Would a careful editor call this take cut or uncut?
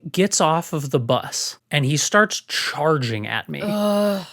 cut